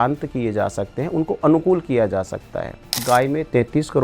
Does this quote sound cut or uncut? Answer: cut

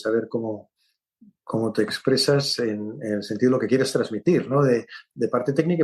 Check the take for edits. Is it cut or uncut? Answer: uncut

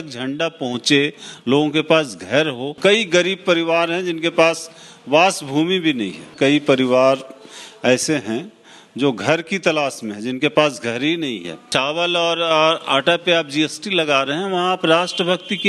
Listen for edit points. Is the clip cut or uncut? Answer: cut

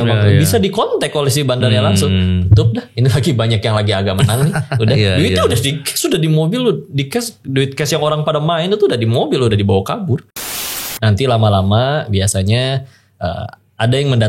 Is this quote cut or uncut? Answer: cut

